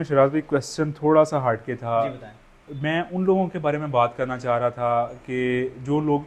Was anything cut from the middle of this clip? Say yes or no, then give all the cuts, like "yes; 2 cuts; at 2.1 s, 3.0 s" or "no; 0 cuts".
no; 0 cuts